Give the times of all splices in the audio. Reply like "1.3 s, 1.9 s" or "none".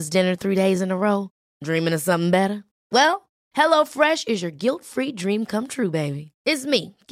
none

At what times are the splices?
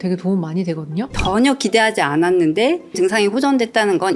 1.1 s

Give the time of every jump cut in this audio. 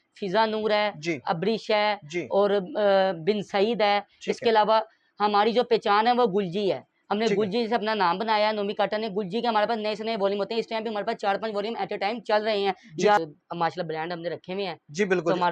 13.2 s

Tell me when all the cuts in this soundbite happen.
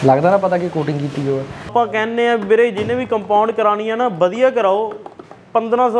1.7 s

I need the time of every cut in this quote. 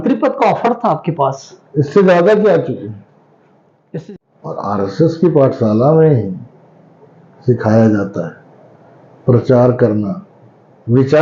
3.9 s

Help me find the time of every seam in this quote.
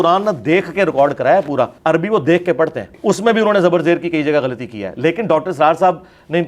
1.8 s, 2.9 s

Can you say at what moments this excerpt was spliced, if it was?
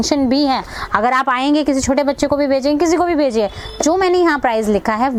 none

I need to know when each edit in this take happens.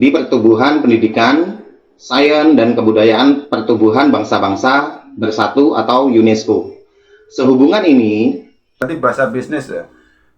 8.8 s

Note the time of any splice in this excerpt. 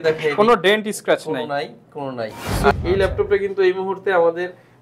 2.7 s

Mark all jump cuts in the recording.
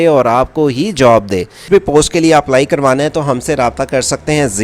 1.6 s

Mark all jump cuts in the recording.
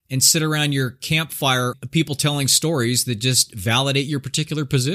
1.8 s

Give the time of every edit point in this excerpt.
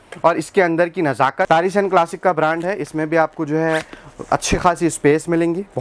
1.5 s

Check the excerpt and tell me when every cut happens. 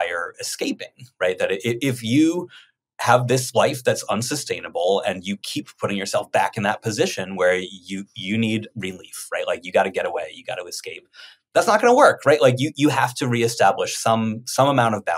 none

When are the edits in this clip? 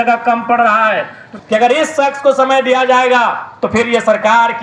1.2 s

